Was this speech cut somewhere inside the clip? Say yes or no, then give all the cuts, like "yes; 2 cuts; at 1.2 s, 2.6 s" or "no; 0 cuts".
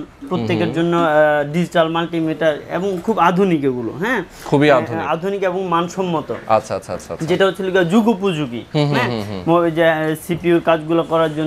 no; 0 cuts